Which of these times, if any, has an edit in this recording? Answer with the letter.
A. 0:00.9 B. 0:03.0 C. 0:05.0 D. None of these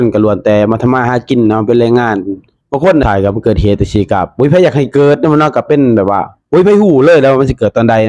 B